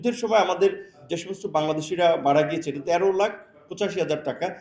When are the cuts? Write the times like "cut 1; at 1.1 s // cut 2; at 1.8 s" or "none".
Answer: cut 1; at 1.0 s // cut 2; at 2.8 s